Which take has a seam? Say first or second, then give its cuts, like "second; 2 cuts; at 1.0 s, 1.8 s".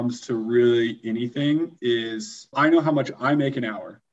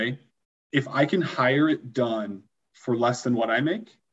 first; 1 cut; at 2.5 s